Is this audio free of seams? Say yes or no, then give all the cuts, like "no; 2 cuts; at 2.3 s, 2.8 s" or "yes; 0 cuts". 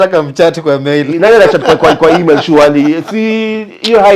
yes; 0 cuts